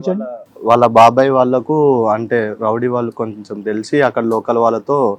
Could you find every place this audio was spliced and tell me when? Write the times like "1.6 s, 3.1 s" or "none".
none